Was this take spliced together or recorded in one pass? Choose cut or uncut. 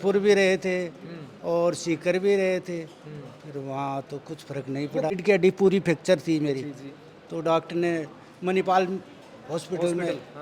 cut